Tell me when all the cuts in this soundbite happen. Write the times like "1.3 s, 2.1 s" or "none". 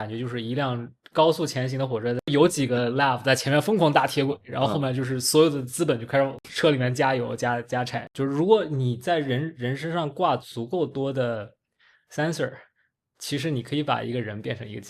2.3 s, 6.4 s, 8.0 s